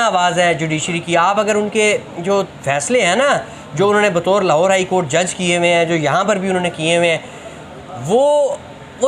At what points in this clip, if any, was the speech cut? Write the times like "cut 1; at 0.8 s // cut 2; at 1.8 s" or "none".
none